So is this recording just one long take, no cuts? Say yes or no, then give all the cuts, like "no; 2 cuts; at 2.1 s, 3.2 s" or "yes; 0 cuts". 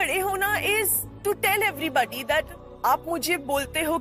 no; 1 cut; at 1.0 s